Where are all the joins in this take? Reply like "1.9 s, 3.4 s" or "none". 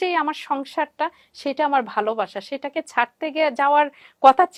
none

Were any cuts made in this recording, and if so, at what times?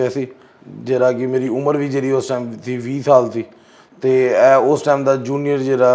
none

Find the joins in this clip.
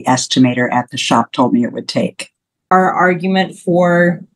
2.7 s

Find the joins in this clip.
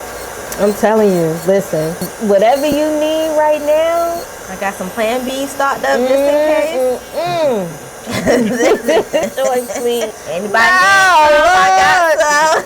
2.0 s, 9.2 s, 10.1 s

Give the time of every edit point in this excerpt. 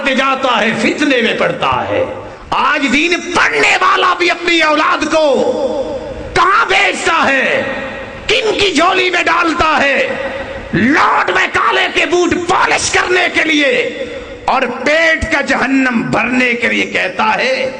2.3 s

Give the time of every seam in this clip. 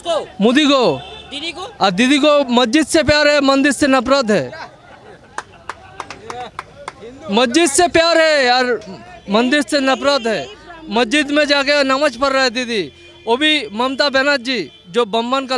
none

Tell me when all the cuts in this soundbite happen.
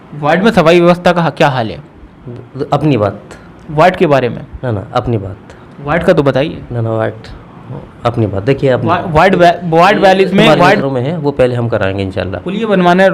10.8 s

